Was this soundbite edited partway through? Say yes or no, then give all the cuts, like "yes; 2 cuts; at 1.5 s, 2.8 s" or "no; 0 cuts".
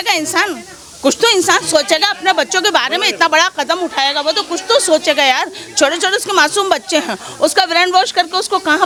no; 0 cuts